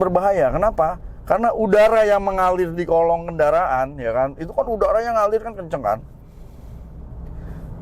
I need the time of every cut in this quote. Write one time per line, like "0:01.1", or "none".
none

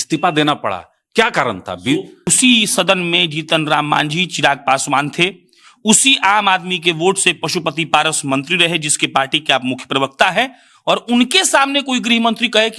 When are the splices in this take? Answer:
0:02.2

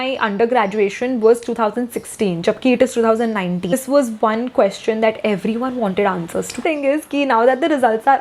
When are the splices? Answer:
0:03.8
0:06.6

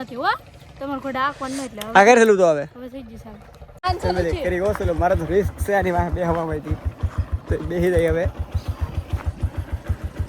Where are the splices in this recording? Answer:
0:03.8

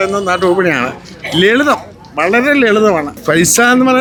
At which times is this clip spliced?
none

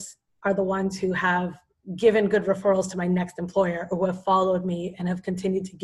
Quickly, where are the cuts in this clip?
none

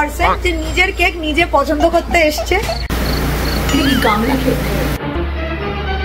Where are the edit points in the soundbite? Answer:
0:05.0

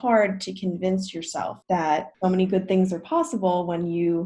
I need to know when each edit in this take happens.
0:01.6
0:02.1

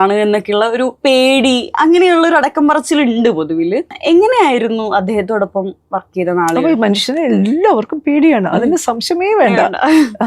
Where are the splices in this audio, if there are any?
0:01.0

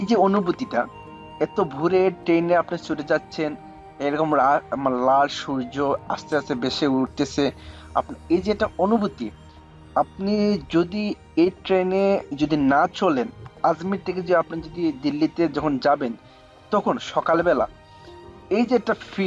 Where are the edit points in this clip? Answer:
none

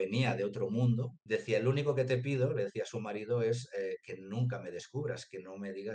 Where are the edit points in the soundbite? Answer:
0:01.1

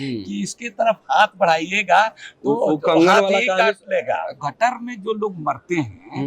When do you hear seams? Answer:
0:04.3

